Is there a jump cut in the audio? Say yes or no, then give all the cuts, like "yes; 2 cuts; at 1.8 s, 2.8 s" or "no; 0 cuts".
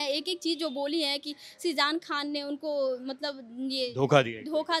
no; 0 cuts